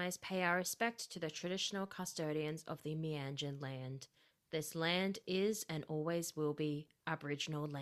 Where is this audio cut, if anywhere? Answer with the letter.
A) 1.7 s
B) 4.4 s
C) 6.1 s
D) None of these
D